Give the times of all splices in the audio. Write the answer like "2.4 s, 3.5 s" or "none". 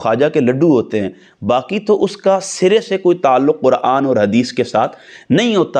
none